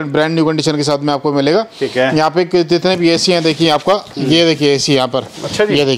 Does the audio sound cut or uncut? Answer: uncut